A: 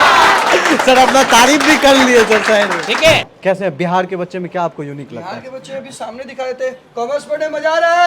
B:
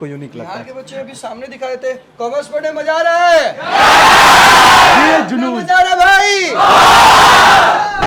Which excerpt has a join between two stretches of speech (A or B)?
A